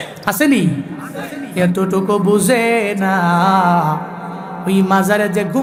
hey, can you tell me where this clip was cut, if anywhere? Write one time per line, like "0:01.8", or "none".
none

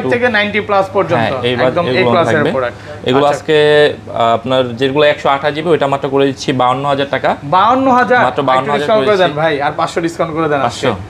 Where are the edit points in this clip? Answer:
none

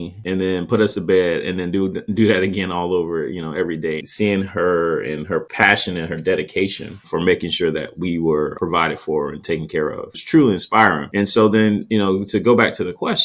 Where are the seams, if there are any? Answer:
0:04.1

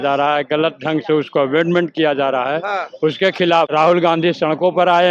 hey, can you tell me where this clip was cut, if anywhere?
0:03.7

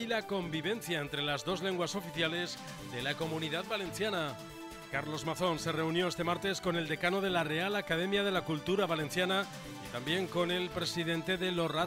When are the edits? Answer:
none

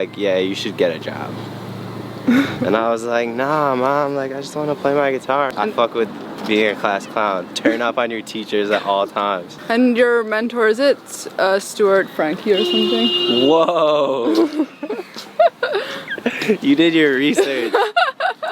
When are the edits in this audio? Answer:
0:05.5
0:09.5

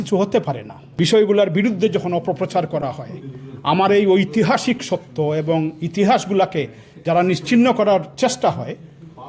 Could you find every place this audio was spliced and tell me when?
0:00.9

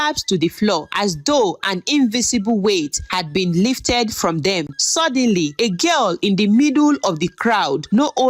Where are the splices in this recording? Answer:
0:04.7

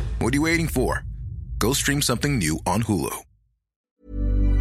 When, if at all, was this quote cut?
0:03.7

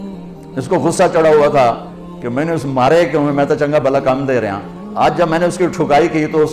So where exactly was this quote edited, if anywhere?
none

